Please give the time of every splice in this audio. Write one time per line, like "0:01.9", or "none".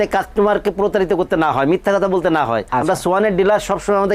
0:02.7